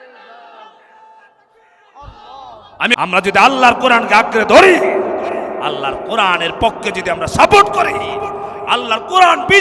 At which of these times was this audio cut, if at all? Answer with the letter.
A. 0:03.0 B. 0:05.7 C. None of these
A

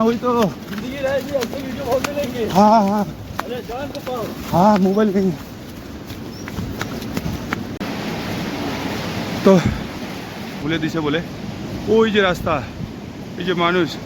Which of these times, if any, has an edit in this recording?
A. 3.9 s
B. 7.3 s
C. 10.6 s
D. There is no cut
C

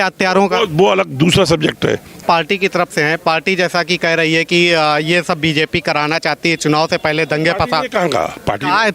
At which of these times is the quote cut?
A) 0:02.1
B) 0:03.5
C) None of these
A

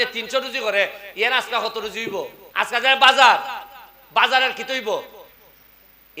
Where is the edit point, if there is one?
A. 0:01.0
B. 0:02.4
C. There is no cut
B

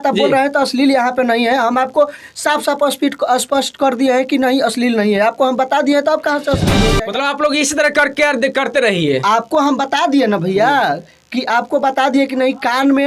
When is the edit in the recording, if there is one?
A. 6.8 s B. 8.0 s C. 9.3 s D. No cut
A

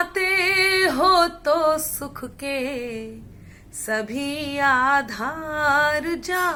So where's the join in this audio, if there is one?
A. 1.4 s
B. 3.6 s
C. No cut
C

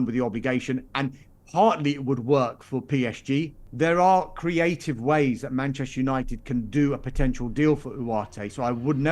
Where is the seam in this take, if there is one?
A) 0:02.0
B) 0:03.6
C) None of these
B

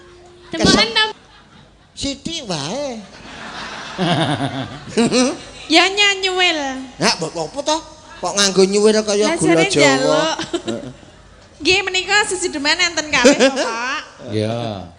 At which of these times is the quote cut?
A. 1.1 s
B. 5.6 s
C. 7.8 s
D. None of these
A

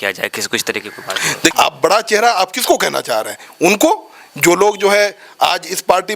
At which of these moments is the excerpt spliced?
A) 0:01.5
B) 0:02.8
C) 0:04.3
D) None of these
A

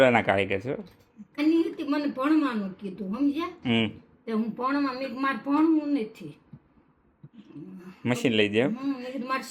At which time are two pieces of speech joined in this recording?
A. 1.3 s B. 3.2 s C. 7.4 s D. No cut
A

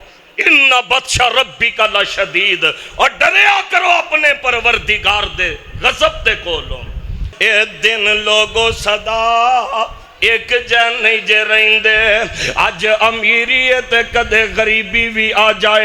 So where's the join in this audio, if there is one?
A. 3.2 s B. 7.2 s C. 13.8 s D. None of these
B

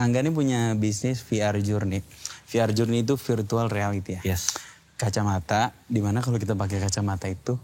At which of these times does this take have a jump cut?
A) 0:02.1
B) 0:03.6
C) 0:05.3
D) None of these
D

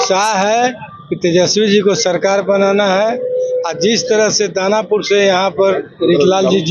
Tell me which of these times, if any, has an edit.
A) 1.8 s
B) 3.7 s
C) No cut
C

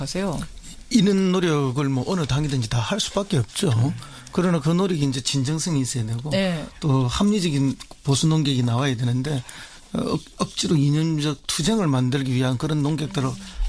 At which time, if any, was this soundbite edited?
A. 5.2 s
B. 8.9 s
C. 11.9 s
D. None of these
D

